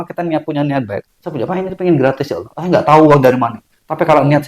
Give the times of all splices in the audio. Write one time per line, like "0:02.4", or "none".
0:01.1